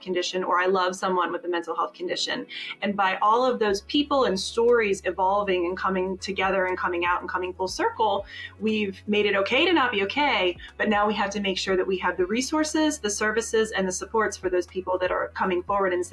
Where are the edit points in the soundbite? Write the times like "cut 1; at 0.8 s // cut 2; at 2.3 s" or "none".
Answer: none